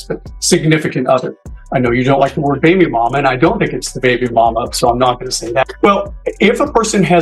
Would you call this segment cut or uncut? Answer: cut